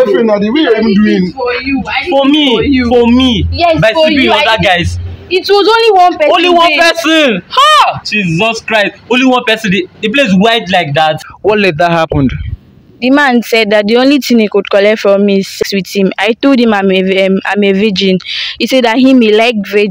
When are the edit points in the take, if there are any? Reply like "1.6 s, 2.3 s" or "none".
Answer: 11.2 s, 15.6 s